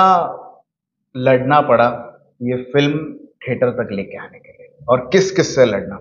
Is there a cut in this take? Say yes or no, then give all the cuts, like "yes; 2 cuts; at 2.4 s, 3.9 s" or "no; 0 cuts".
no; 0 cuts